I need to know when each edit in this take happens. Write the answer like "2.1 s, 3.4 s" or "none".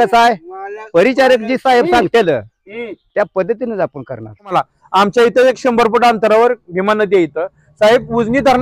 4.5 s